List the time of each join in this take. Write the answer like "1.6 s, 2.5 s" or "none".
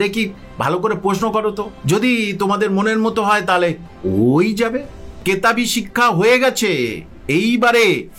1.7 s, 5.2 s